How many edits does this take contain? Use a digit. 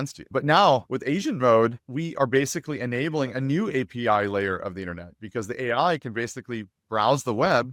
0